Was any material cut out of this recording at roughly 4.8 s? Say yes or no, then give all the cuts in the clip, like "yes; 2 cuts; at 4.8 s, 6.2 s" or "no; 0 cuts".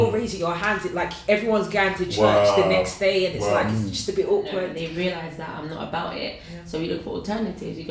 yes; 1 cut; at 4.8 s